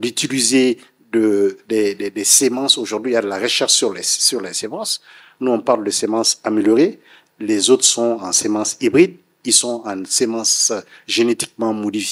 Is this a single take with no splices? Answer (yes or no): yes